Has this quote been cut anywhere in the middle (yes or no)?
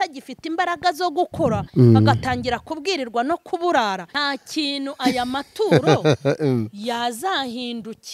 yes